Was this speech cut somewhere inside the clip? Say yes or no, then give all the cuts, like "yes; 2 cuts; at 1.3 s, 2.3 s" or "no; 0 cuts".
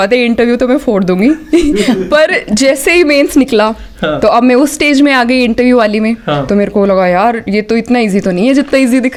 no; 0 cuts